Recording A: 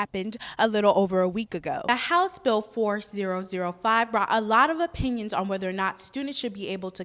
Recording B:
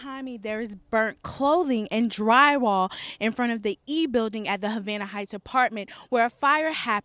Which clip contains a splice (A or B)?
A